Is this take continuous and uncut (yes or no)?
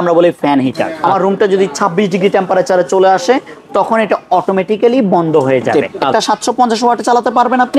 no